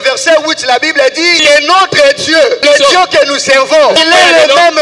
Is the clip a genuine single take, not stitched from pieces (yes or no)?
no